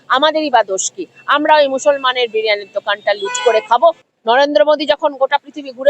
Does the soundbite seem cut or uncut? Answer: cut